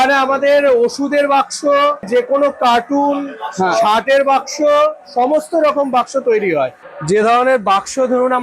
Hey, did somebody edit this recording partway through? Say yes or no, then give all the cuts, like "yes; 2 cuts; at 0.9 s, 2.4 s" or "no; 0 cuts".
yes; 2 cuts; at 2.1 s, 6.8 s